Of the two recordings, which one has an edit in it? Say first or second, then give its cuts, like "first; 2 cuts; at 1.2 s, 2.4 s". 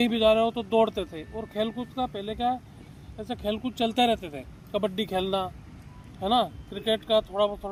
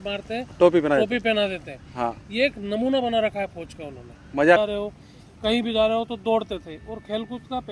second; 1 cut; at 4.6 s